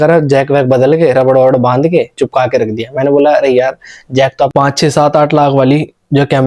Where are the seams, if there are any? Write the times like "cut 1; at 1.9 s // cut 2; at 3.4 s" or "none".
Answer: cut 1; at 4.5 s